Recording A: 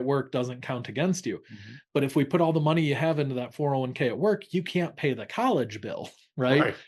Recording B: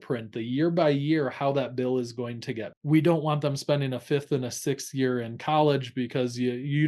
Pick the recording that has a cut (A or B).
B